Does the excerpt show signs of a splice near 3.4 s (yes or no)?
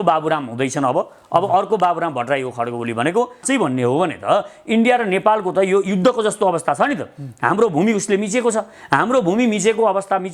yes